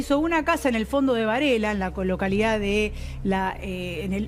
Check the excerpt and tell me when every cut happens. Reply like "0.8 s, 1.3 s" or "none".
none